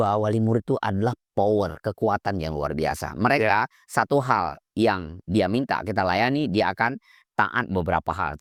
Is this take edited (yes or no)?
no